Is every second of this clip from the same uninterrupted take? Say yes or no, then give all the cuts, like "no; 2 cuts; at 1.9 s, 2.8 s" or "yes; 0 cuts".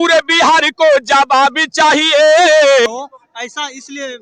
no; 1 cut; at 2.9 s